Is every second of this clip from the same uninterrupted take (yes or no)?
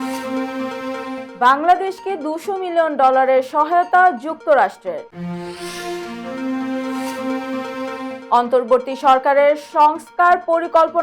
no